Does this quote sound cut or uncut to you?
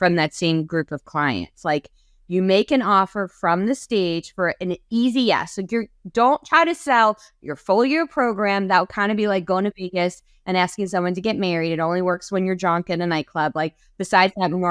uncut